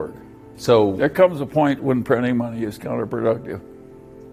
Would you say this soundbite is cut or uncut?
uncut